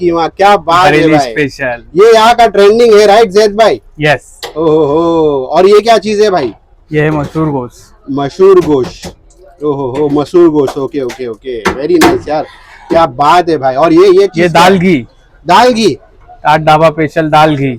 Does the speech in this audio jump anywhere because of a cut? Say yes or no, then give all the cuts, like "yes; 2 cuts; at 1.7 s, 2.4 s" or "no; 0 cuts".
no; 0 cuts